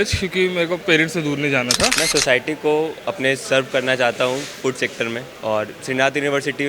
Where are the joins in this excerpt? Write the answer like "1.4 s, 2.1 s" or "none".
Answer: 2.0 s, 5.3 s